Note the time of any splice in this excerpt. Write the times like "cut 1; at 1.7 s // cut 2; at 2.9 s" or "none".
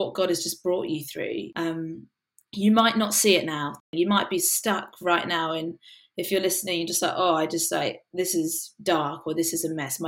cut 1; at 1.5 s // cut 2; at 3.9 s